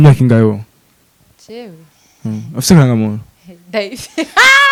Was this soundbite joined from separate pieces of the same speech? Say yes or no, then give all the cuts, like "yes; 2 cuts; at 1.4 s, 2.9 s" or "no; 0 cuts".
no; 0 cuts